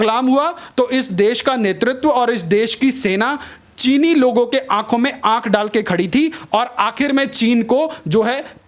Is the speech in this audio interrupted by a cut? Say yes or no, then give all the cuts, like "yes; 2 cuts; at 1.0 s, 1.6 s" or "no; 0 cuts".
no; 0 cuts